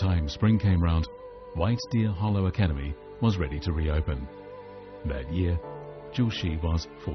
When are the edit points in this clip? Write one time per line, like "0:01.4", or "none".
none